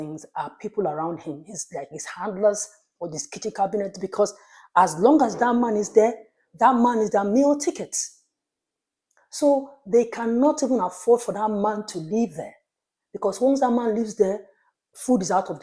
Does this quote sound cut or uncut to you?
uncut